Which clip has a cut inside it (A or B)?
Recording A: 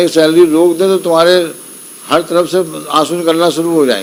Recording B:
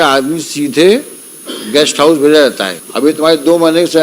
B